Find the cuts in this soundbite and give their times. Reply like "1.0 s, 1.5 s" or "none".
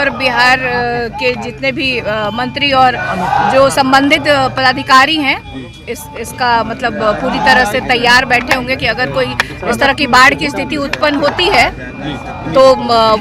none